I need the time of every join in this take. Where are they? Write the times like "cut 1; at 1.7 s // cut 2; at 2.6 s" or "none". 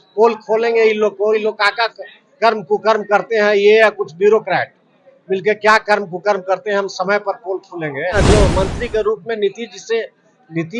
cut 1; at 8.1 s